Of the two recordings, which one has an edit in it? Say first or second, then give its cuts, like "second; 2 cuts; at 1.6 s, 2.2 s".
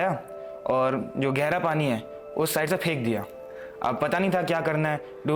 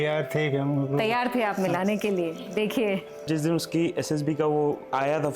second; 1 cut; at 3.3 s